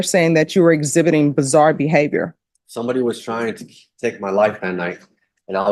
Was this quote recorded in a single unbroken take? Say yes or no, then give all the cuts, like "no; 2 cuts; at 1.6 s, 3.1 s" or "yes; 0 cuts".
yes; 0 cuts